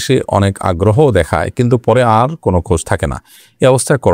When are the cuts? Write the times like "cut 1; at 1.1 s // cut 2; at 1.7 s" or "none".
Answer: none